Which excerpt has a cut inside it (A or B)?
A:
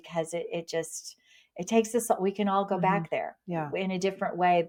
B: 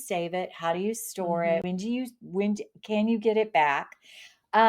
B